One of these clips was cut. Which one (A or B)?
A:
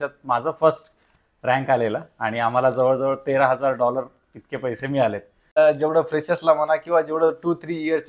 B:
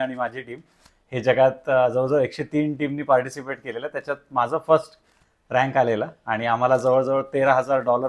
A